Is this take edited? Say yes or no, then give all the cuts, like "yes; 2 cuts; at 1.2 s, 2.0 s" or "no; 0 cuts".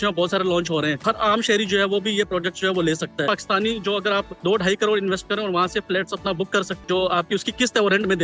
yes; 4 cuts; at 1.0 s, 3.3 s, 4.3 s, 6.7 s